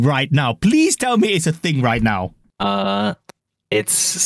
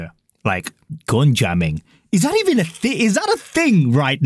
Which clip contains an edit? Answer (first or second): first